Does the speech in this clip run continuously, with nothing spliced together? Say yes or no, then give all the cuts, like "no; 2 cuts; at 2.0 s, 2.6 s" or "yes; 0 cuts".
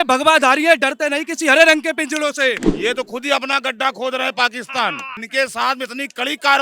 no; 2 cuts; at 2.7 s, 5.1 s